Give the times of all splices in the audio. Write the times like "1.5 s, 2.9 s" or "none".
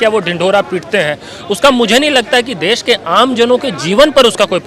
none